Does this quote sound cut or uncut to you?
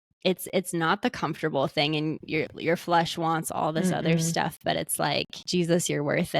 cut